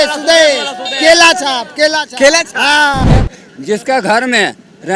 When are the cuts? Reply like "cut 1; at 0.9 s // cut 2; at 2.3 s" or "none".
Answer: cut 1; at 3.1 s